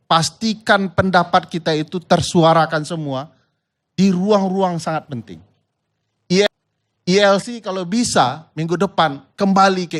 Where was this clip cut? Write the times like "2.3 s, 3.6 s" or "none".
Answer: none